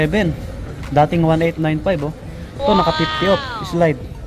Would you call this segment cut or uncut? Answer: uncut